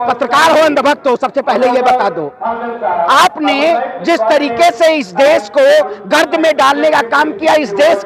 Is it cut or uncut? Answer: uncut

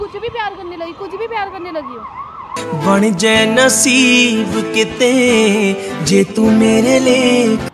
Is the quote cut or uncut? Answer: uncut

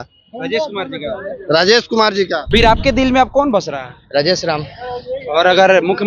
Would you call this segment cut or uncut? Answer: cut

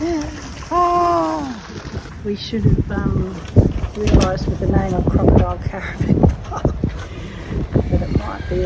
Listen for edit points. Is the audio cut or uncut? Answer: cut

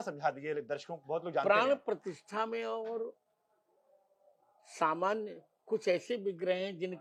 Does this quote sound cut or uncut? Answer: uncut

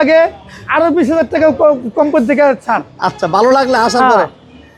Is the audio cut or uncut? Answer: uncut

